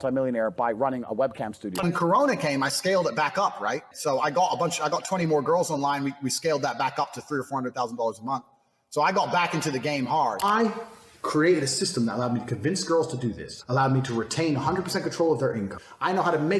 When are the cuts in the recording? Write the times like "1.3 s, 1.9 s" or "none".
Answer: 1.8 s, 10.4 s